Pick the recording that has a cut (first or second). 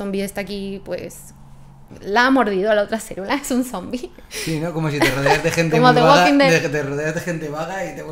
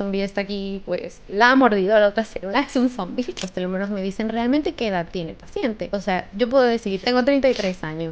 second